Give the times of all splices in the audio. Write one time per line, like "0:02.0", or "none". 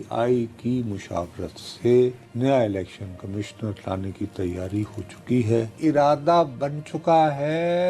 0:02.2
0:05.8